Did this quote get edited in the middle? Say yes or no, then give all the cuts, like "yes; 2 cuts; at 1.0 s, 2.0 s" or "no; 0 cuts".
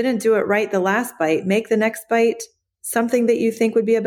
no; 0 cuts